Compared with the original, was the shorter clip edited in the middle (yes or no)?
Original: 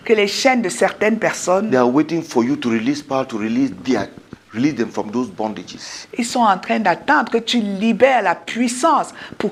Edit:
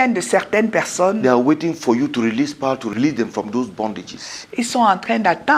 yes